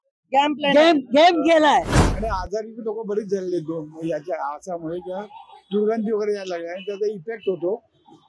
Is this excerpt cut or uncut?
cut